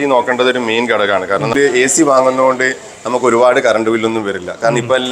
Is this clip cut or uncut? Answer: cut